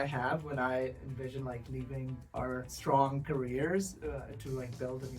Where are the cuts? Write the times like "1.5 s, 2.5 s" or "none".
2.7 s